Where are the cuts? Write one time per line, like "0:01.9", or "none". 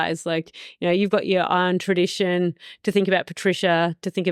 none